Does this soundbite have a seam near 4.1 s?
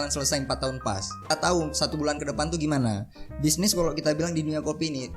no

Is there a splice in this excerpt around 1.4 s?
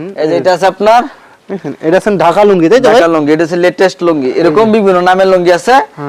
no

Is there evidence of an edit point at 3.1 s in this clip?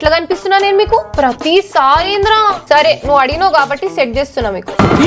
no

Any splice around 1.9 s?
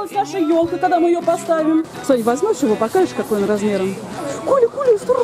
yes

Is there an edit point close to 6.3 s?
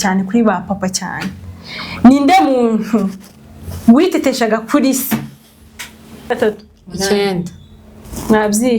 yes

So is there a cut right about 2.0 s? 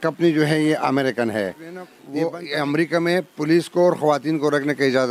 yes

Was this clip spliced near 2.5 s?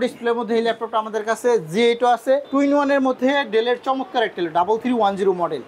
yes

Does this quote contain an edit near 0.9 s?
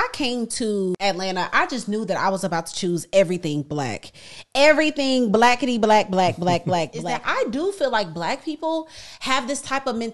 yes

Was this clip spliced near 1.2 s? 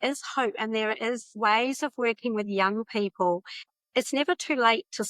no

